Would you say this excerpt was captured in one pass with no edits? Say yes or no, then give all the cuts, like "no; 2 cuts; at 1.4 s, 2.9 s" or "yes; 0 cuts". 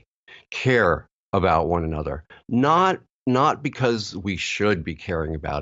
yes; 0 cuts